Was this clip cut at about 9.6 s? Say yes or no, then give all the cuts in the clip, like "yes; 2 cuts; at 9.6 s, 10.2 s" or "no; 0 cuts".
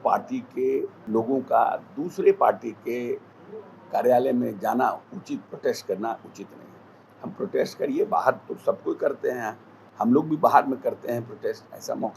no; 1 cut; at 1.0 s